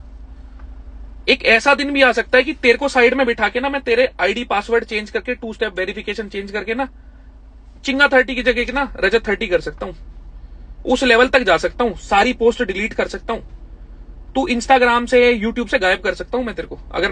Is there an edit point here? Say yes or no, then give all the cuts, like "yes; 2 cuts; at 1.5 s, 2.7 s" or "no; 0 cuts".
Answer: no; 0 cuts